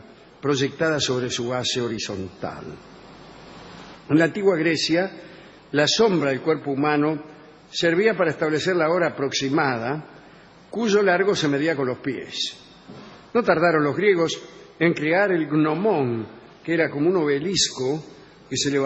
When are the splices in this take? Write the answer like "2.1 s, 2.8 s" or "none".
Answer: 12.0 s